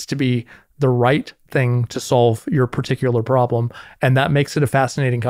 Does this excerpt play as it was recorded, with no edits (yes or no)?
yes